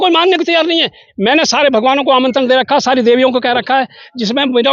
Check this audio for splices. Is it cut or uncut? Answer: cut